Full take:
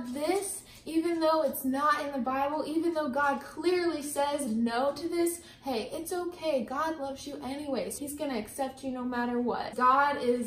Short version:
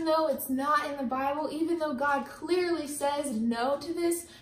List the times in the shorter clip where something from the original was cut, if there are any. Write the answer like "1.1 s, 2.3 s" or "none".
none